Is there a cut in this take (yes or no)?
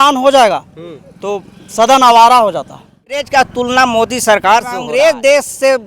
yes